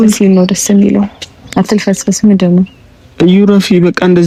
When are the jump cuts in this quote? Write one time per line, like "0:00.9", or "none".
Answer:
none